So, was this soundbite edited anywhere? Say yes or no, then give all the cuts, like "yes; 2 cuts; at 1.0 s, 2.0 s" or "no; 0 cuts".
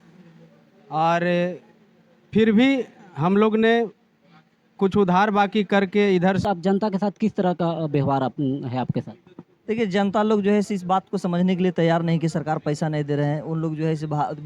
yes; 1 cut; at 6.4 s